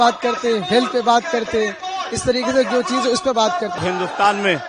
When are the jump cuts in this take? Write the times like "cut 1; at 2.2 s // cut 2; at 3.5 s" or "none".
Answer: cut 1; at 3.8 s